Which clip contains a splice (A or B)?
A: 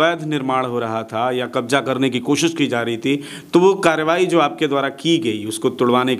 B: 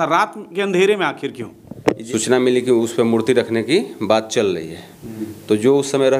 B